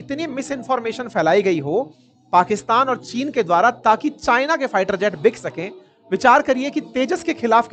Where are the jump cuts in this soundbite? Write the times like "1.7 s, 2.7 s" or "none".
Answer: none